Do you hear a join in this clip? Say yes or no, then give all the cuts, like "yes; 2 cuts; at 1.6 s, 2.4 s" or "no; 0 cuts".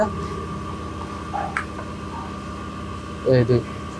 no; 0 cuts